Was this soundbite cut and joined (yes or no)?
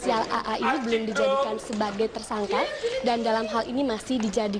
yes